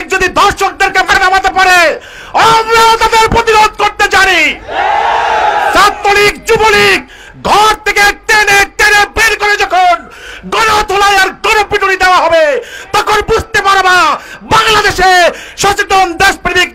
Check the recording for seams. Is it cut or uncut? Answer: cut